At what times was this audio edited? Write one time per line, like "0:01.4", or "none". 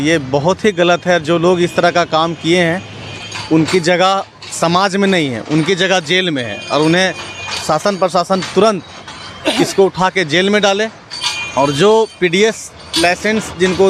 none